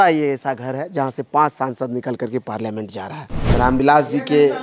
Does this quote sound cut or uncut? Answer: cut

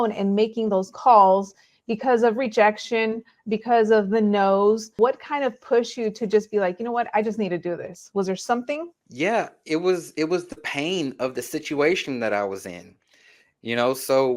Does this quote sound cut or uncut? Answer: cut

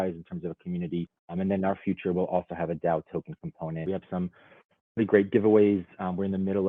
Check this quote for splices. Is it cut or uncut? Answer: cut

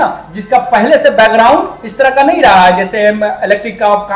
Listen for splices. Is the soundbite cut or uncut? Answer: uncut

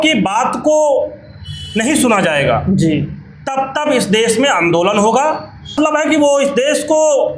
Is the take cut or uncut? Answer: cut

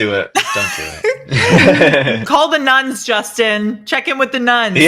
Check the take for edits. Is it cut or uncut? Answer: uncut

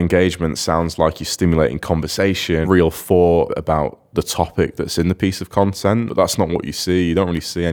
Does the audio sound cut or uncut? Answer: cut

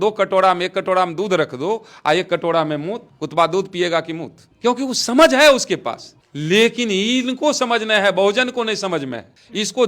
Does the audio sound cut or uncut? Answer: uncut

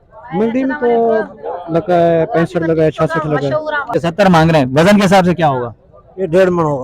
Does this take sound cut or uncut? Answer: cut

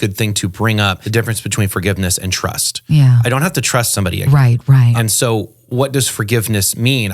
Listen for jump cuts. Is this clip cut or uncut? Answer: cut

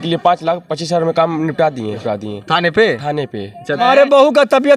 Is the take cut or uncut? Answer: cut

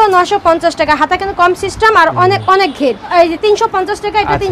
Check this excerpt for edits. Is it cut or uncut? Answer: cut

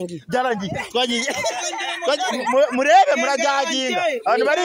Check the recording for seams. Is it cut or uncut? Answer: uncut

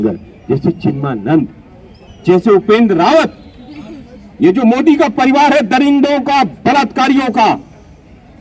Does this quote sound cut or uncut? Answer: uncut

